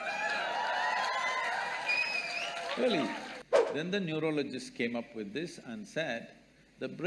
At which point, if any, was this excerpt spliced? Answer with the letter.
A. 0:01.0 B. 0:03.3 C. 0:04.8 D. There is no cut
B